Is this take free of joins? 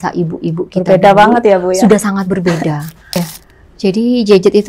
no; 1 cut; at 3.2 s

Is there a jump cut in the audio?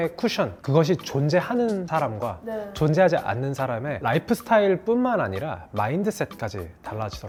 no; 0 cuts

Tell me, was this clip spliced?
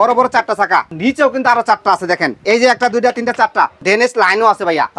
yes; 3 cuts; at 1.0 s, 2.4 s, 3.8 s

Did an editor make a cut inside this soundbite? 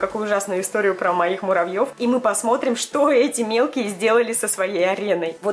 no; 0 cuts

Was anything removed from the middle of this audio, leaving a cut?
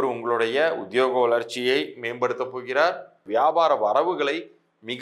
yes; 1 cut; at 3.2 s

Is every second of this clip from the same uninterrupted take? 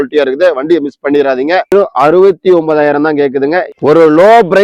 no; 2 cuts; at 1.7 s, 3.7 s

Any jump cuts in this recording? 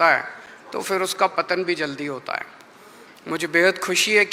no; 0 cuts

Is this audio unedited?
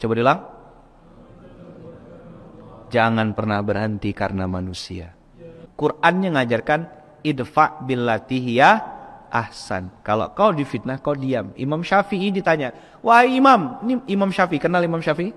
no; 1 cut; at 5.6 s

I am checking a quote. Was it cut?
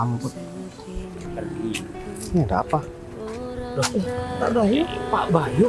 yes; 1 cut; at 1.0 s

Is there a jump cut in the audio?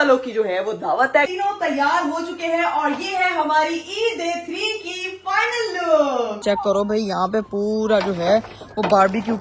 yes; 2 cuts; at 1.3 s, 6.4 s

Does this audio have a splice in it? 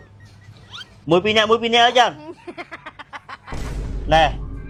no; 0 cuts

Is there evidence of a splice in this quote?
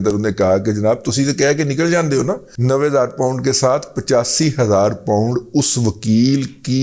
yes; 1 cut; at 2.5 s

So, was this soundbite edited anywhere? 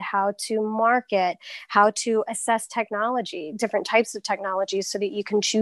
no; 0 cuts

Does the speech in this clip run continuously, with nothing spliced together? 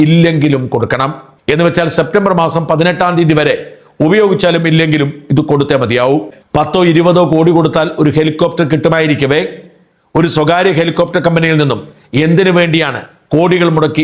yes; 0 cuts

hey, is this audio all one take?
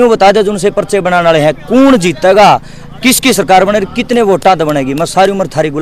yes; 0 cuts

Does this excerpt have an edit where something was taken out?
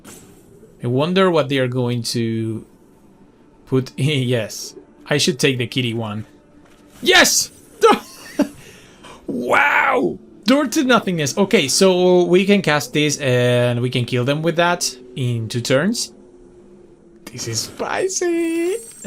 yes; 1 cut; at 17.2 s

